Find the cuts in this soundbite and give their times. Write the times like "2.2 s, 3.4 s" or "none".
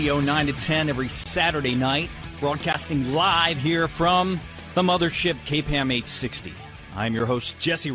none